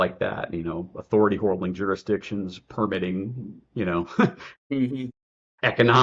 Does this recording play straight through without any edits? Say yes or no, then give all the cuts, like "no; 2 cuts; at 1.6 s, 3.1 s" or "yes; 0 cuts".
yes; 0 cuts